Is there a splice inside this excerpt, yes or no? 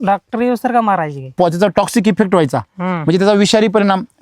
yes